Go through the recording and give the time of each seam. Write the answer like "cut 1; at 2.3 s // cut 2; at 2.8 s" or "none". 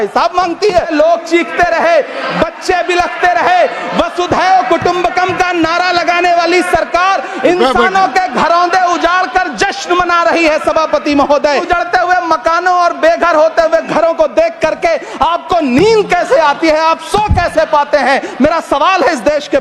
cut 1; at 0.9 s // cut 2; at 11.6 s